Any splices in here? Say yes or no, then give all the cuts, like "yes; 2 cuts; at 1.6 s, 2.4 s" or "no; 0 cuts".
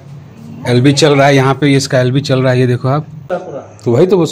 yes; 1 cut; at 3.4 s